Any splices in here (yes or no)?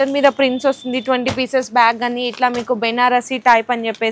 no